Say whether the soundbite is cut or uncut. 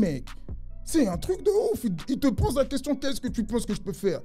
uncut